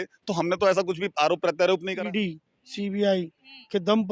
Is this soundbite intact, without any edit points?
no; 1 cut; at 1.9 s

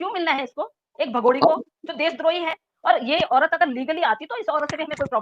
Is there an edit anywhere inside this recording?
yes; 1 cut; at 2.7 s

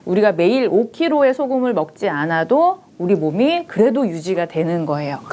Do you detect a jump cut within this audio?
no; 0 cuts

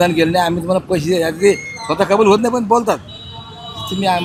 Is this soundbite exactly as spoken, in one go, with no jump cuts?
yes; 0 cuts

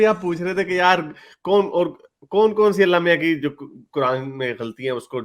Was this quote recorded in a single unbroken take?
yes; 0 cuts

